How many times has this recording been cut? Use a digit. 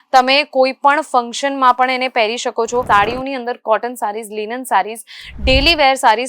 1